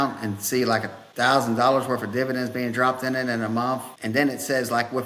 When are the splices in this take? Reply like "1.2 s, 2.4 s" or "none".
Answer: 1.0 s, 3.9 s